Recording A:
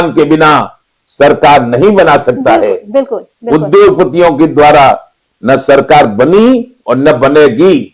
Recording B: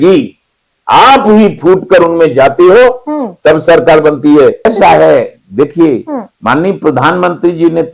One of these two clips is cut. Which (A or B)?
B